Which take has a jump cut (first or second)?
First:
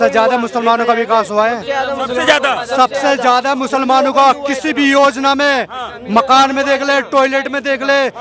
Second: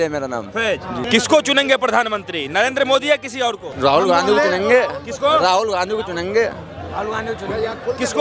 second